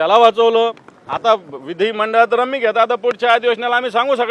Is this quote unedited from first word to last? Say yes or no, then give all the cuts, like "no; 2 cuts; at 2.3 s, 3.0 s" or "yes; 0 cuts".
yes; 0 cuts